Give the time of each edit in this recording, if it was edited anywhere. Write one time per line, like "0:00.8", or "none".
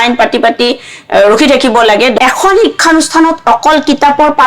0:02.2